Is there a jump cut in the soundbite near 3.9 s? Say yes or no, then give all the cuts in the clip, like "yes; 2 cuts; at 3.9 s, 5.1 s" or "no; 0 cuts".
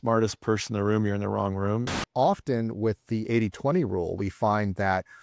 no; 1 cut; at 2.0 s